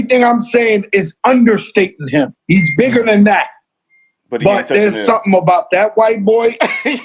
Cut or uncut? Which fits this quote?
uncut